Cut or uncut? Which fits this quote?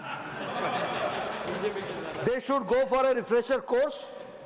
uncut